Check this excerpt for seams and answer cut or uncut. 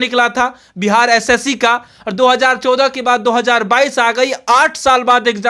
uncut